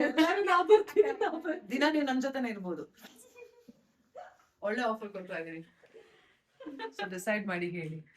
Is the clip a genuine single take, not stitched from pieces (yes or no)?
no